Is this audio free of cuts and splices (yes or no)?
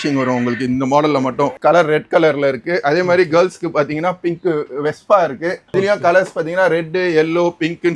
no